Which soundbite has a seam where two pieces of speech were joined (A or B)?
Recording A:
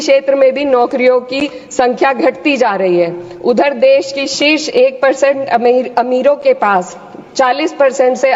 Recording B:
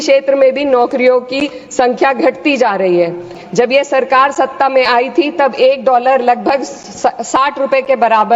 B